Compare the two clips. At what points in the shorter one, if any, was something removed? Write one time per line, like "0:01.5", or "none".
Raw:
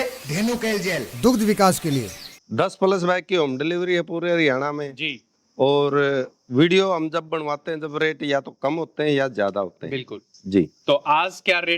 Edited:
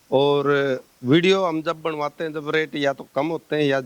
none